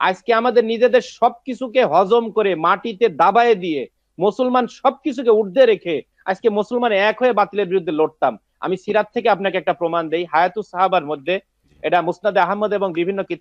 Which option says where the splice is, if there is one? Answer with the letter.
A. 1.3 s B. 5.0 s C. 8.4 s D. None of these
D